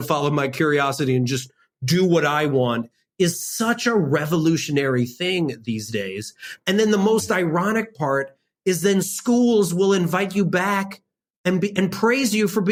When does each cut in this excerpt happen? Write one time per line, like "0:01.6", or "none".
none